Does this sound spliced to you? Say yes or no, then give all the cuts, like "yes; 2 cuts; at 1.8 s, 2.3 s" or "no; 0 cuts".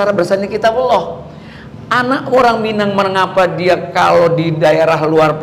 no; 0 cuts